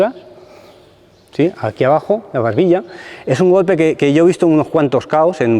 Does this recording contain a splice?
no; 0 cuts

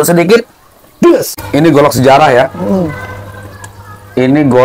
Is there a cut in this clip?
yes; 1 cut; at 1.4 s

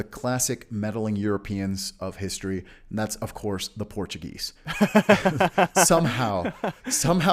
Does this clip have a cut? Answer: no; 0 cuts

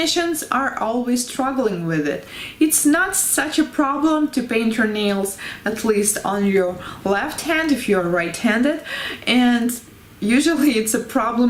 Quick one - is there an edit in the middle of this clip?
no; 0 cuts

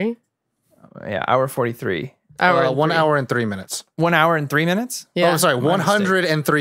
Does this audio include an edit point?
no; 0 cuts

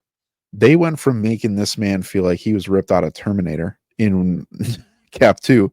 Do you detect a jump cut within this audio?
yes; 1 cut; at 3.8 s

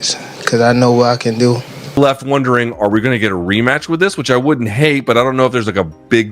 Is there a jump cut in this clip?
yes; 1 cut; at 2.0 s

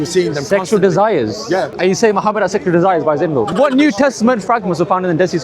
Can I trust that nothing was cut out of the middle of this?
no; 2 cuts; at 1.8 s, 3.5 s

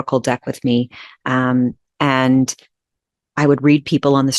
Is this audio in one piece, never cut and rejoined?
yes; 0 cuts

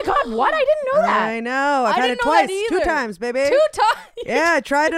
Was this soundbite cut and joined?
no; 0 cuts

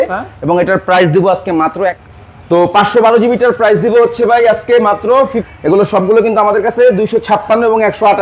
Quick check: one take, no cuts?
no; 2 cuts; at 1.7 s, 5.4 s

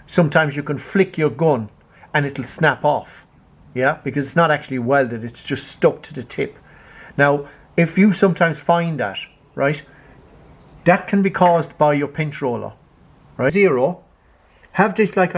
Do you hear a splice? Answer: yes; 1 cut; at 13.5 s

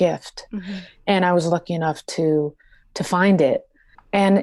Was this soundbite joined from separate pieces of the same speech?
no; 0 cuts

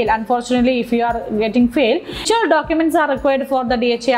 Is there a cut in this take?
yes; 1 cut; at 2.2 s

